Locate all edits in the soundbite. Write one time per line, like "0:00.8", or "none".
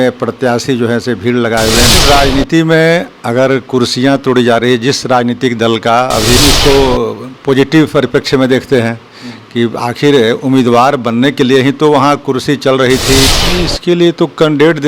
0:02.0
0:06.4
0:13.3